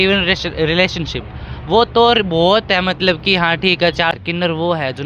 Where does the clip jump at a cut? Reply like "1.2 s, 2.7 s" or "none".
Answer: 4.1 s

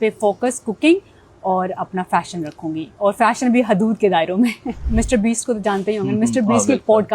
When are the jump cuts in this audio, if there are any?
4.8 s

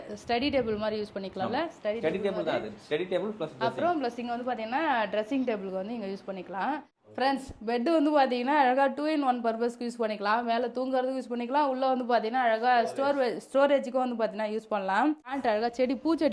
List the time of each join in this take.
6.9 s, 15.4 s

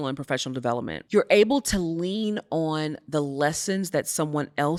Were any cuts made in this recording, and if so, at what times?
none

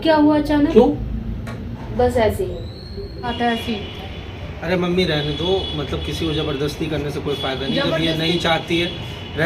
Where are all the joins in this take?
3.3 s

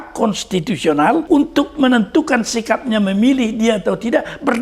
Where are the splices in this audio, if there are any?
1.2 s

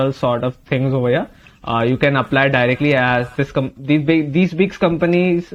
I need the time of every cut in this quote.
none

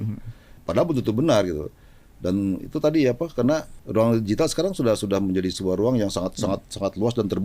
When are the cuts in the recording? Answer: none

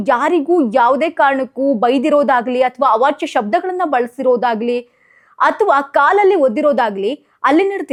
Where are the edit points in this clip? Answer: none

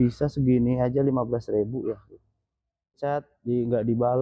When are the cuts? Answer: 2.9 s

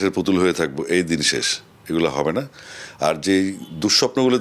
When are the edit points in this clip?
none

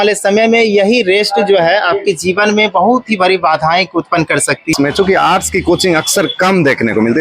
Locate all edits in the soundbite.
4.7 s

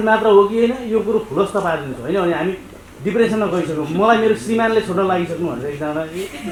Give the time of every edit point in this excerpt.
none

